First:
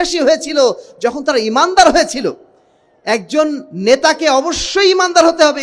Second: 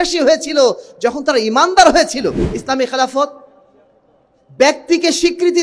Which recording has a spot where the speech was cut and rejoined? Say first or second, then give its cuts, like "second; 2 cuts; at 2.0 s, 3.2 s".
second; 1 cut; at 2.5 s